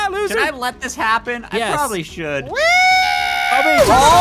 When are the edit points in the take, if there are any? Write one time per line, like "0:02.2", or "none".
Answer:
none